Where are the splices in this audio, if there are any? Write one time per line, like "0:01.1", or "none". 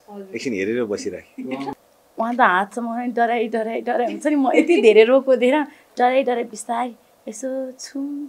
0:01.8